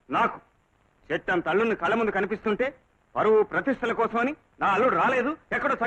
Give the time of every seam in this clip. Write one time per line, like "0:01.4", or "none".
none